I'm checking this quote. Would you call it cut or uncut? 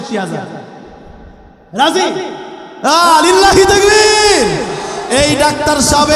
uncut